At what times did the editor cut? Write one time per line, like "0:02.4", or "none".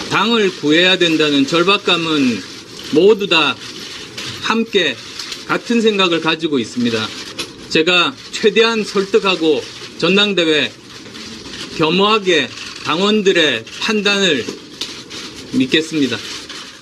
0:01.4